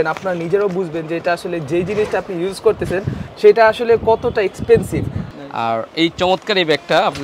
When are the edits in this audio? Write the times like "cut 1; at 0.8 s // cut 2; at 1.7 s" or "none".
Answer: cut 1; at 5.2 s